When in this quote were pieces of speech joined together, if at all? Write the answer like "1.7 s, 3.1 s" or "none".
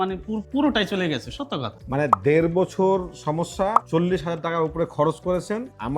1.7 s